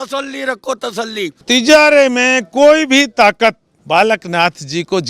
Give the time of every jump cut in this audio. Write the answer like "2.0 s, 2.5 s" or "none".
1.4 s, 3.7 s